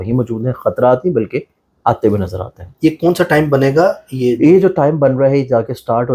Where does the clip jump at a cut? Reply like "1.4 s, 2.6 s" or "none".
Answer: none